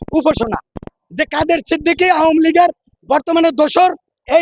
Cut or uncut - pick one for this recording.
cut